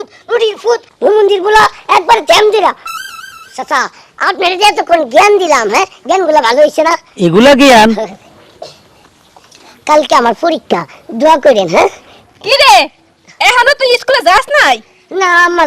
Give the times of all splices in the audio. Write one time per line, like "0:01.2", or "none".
none